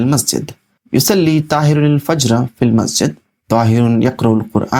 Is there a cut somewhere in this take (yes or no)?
no